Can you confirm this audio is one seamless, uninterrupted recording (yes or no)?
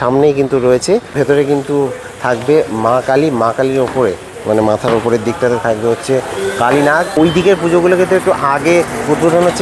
no